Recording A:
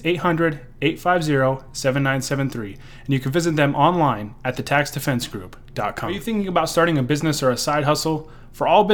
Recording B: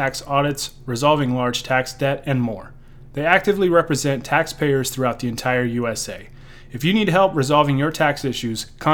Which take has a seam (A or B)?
A